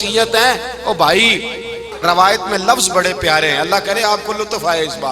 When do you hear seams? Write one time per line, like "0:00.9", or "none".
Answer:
0:01.9